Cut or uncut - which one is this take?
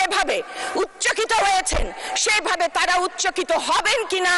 uncut